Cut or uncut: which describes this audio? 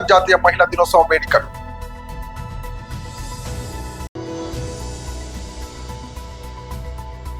uncut